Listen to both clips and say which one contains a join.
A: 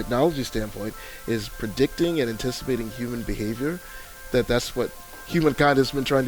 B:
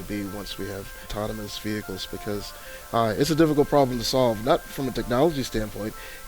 B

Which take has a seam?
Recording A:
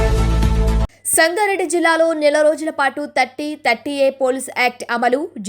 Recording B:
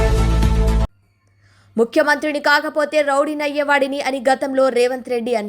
A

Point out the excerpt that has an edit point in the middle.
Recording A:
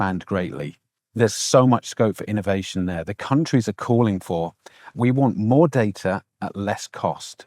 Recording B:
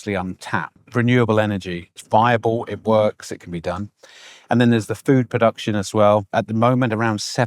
B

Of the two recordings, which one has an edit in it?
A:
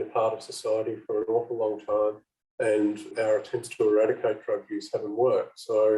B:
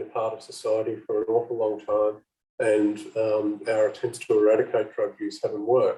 A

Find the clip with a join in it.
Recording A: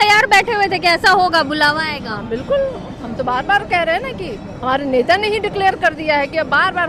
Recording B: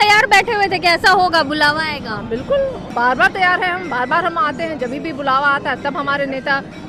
B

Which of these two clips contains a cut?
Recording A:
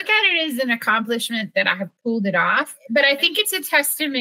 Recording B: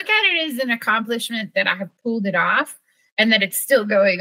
A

